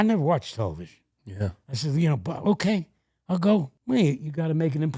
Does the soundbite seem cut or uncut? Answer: cut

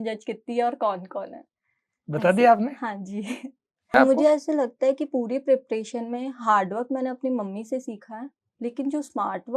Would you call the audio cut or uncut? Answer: cut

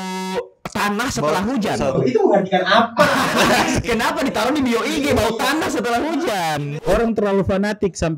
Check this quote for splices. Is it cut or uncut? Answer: cut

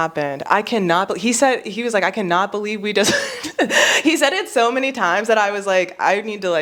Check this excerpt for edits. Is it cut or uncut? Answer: uncut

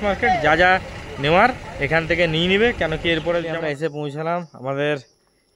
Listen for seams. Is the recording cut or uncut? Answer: cut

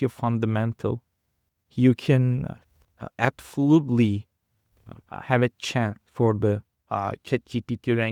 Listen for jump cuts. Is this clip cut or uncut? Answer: uncut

